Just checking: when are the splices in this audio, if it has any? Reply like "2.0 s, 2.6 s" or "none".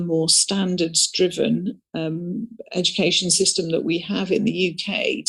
none